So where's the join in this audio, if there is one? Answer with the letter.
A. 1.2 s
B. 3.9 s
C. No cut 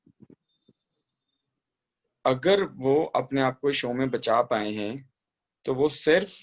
C